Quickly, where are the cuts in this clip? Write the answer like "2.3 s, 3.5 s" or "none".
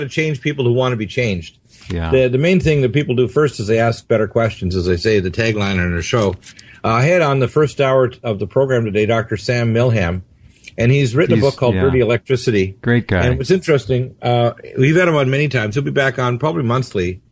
9.6 s